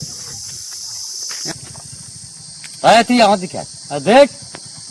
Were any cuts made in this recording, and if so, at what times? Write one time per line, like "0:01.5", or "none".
0:01.5